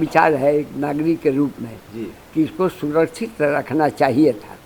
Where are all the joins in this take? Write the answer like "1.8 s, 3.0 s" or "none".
none